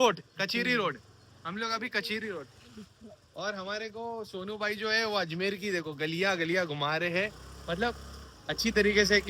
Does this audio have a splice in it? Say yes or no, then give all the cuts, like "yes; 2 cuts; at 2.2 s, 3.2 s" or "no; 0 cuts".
no; 0 cuts